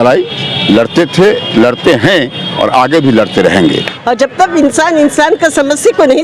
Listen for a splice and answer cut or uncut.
cut